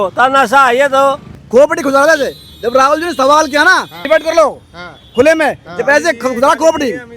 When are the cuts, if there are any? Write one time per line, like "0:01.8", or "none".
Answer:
0:01.3
0:03.9